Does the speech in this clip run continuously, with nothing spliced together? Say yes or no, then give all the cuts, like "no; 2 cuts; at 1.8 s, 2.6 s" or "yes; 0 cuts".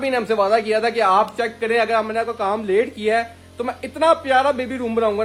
yes; 0 cuts